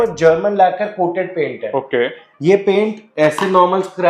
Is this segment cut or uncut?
uncut